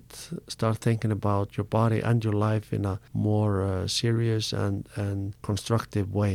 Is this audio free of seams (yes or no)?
no